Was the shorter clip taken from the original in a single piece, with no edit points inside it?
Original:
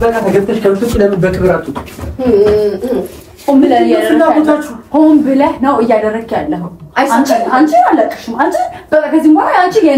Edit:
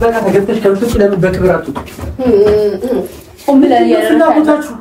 yes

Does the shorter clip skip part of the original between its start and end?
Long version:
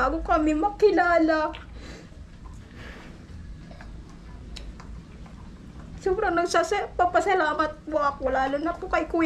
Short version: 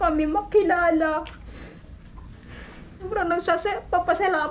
yes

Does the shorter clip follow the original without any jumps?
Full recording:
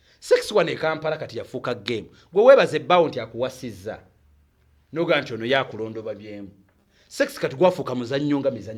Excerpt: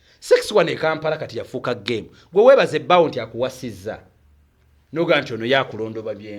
yes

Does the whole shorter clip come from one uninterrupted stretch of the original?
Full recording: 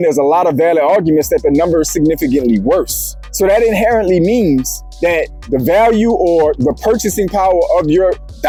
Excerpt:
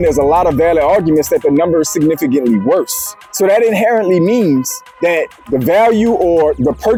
yes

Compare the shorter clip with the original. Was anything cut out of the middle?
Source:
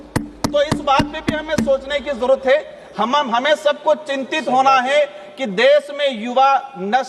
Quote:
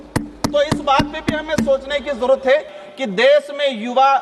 yes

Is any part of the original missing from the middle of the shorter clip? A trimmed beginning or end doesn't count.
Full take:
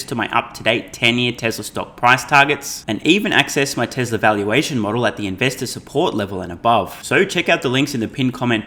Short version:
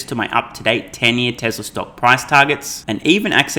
no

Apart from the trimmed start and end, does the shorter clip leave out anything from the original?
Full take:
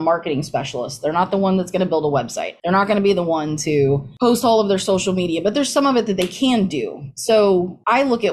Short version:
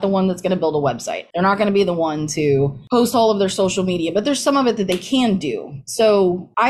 no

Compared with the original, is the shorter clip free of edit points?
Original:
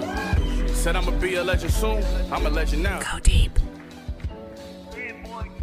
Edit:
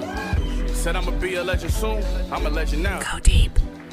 yes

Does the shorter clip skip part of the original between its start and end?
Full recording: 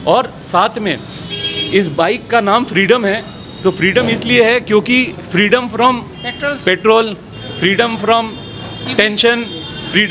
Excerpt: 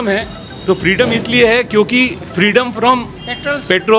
no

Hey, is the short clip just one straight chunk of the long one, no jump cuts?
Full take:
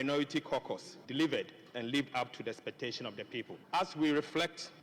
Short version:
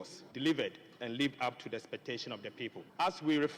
yes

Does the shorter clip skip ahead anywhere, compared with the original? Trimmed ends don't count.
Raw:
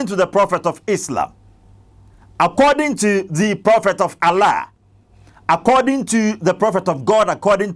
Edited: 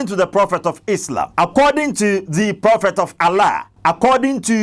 yes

